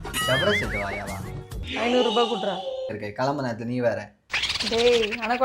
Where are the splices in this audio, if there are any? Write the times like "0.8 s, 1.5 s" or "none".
3.0 s